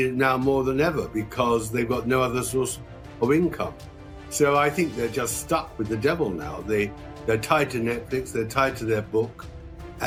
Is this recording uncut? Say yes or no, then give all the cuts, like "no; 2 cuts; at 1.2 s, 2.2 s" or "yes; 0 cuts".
yes; 0 cuts